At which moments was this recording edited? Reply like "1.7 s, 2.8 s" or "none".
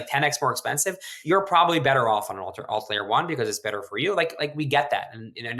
1.2 s

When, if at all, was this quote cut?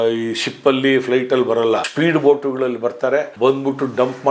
1.9 s, 3.3 s

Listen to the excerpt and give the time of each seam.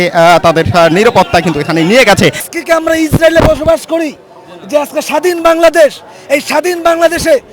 2.5 s

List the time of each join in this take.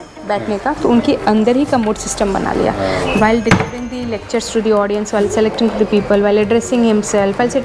none

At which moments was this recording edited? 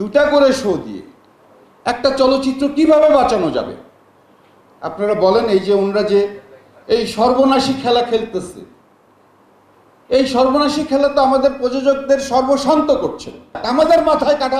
13.6 s

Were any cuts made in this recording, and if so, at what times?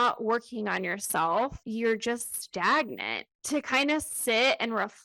1.6 s, 3.3 s

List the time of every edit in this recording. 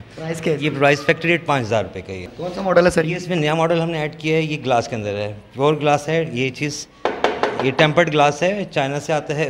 none

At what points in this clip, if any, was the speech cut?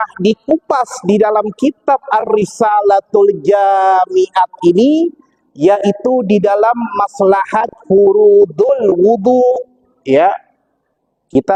none

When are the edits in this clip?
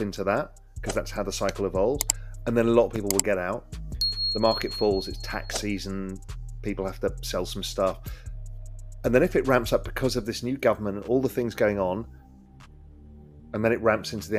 none

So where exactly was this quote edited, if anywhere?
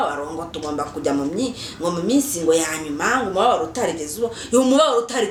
none

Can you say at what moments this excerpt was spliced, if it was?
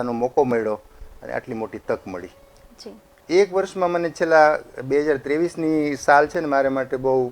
3.1 s

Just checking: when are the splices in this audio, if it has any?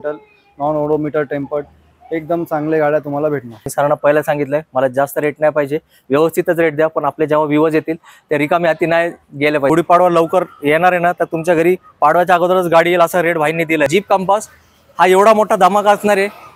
3.7 s, 9.7 s, 13.9 s

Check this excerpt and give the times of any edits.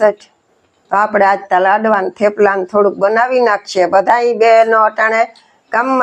none

